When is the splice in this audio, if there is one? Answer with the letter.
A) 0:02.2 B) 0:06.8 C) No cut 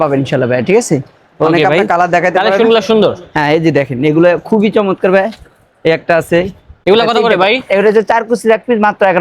B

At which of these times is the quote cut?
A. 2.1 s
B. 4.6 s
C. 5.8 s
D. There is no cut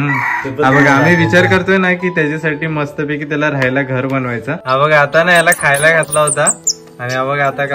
B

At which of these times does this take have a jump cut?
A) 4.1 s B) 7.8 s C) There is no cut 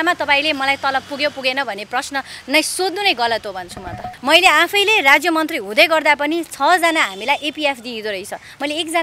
A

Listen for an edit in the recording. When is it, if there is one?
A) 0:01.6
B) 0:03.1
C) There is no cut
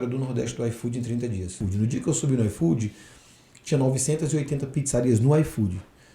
A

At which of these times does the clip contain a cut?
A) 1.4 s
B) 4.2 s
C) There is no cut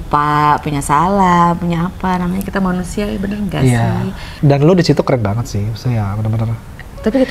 B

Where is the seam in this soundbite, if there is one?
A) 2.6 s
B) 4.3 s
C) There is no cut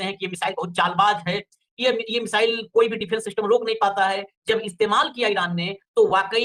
C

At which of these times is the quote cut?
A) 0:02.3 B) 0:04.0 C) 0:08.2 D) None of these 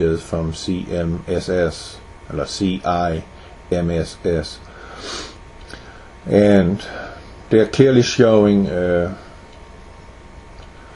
A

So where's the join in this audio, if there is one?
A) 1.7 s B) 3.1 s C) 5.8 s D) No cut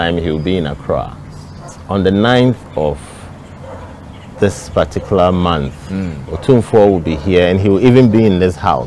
A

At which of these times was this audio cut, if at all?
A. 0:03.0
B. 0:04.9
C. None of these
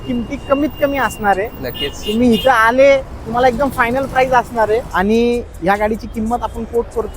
B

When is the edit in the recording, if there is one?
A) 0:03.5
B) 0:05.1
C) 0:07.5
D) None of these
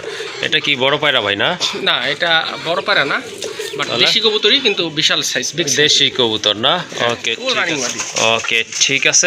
C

